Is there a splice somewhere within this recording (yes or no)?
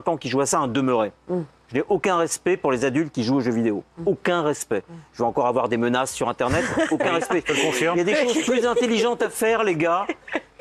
no